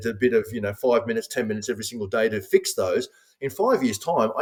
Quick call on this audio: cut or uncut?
uncut